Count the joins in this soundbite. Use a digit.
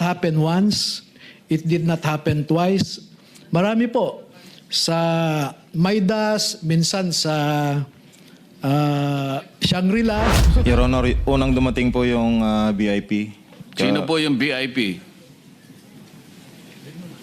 1